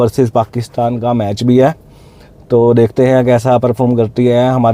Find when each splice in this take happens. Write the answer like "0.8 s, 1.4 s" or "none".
none